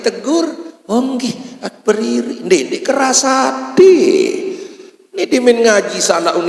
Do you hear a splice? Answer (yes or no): no